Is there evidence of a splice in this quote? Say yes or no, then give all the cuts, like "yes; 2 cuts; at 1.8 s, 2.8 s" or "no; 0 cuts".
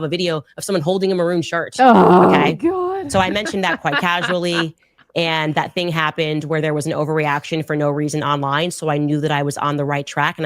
no; 0 cuts